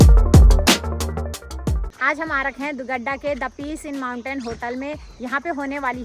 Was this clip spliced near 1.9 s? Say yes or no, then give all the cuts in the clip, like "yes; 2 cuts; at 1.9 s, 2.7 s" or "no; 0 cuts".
yes; 1 cut; at 1.9 s